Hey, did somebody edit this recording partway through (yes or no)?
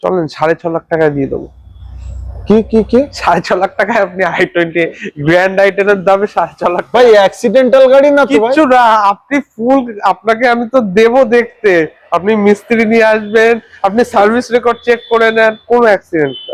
no